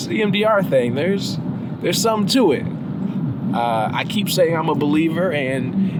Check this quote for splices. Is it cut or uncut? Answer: uncut